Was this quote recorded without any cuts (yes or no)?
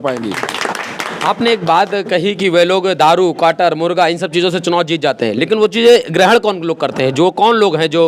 yes